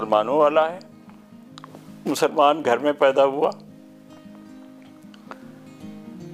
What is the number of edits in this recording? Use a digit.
0